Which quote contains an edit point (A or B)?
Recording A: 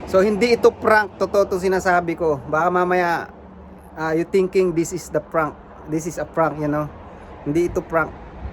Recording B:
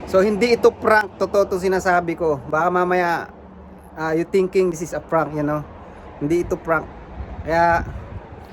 B